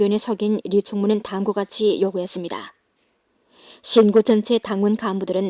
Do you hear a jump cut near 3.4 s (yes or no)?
no